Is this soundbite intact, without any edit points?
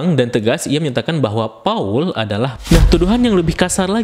no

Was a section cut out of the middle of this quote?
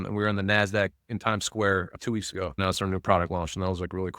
yes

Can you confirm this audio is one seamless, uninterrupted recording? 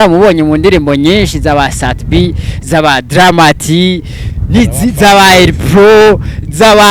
yes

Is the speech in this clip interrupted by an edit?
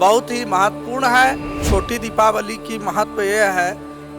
yes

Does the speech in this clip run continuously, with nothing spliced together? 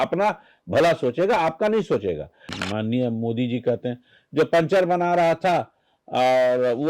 no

